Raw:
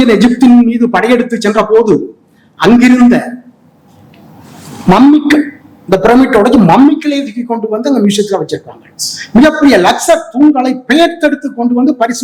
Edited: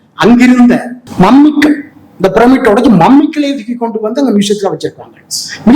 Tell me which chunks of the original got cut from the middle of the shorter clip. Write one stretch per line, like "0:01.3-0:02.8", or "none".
0:03.4-0:04.7